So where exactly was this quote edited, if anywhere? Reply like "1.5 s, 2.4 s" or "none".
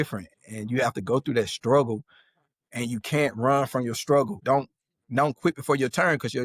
4.4 s